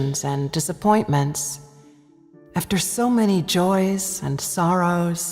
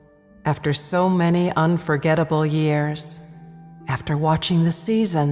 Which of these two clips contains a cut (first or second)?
first